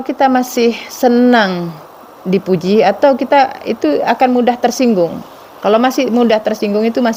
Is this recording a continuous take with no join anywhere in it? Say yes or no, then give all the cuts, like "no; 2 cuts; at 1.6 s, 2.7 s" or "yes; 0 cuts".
yes; 0 cuts